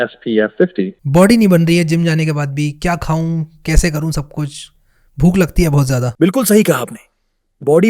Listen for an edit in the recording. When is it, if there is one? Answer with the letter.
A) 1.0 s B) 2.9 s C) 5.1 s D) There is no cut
A